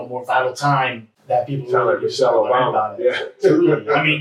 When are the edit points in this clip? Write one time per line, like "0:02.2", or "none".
0:01.1